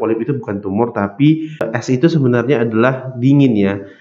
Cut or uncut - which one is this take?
cut